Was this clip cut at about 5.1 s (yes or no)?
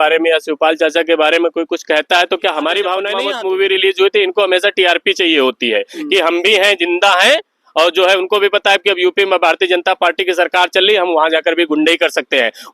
no